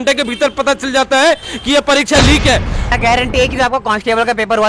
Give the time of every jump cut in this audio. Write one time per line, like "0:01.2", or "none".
0:02.8